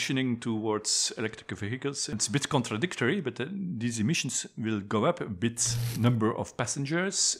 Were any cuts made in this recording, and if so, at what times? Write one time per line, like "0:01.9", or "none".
0:02.1
0:05.8